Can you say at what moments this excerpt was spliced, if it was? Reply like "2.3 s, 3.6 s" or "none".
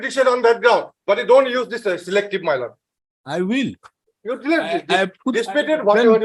none